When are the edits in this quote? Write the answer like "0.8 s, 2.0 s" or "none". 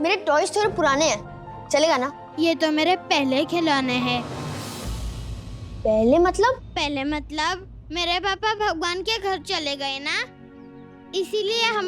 2.2 s